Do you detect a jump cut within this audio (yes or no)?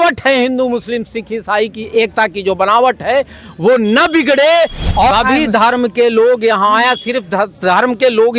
yes